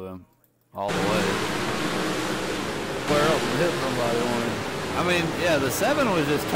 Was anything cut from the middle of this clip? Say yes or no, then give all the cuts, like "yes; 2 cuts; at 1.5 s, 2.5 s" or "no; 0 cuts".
yes; 1 cut; at 3.1 s